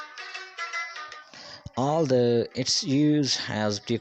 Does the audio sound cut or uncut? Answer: cut